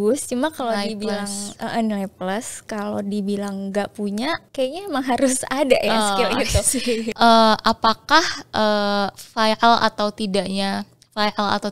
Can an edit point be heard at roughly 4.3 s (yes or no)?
no